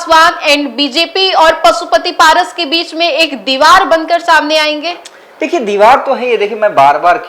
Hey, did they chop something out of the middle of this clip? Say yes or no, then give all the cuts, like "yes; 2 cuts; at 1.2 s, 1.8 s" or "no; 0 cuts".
no; 0 cuts